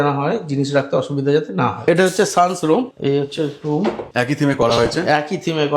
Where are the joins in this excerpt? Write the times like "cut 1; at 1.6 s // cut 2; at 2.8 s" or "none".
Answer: cut 1; at 1.8 s // cut 2; at 2.9 s // cut 3; at 4.0 s